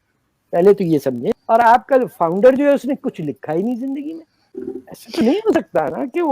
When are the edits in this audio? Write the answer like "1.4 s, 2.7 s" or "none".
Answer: 1.3 s, 4.6 s